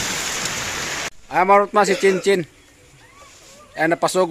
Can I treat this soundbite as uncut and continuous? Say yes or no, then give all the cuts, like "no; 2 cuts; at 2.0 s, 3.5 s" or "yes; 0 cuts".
no; 1 cut; at 1.1 s